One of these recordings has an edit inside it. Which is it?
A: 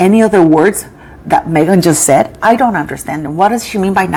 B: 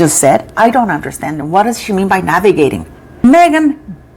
B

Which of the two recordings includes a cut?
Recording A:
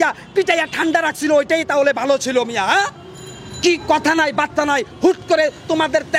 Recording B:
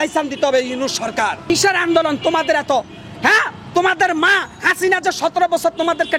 B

